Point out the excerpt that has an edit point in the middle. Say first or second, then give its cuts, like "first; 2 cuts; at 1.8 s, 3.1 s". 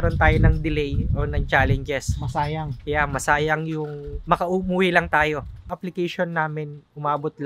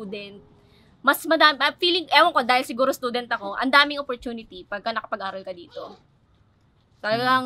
first; 1 cut; at 5.6 s